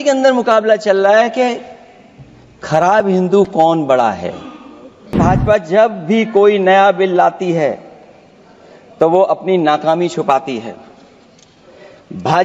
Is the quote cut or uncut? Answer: cut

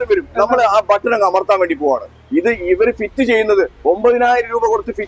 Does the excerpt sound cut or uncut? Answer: cut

